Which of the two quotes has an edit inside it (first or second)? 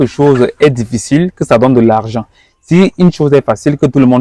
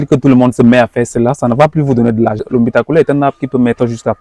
second